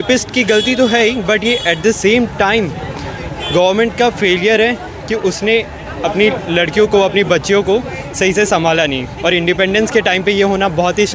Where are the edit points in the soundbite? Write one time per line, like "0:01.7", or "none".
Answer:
none